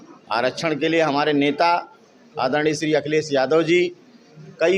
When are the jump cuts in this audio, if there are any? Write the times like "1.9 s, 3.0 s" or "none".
none